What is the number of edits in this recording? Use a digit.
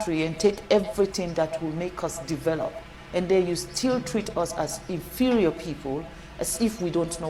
0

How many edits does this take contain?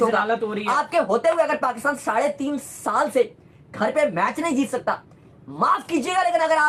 0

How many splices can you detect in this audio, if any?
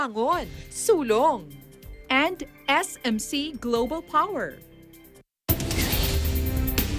1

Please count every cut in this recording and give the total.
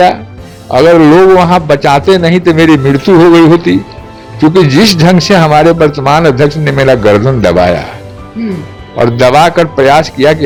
0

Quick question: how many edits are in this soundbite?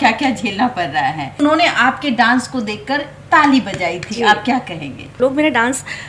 2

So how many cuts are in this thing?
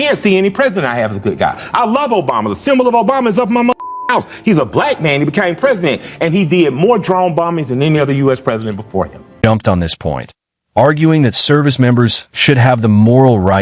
0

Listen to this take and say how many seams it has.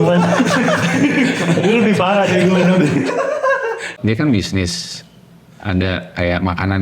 1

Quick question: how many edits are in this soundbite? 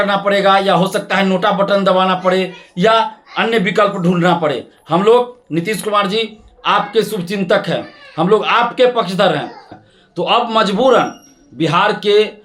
1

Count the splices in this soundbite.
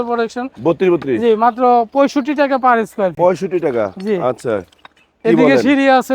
0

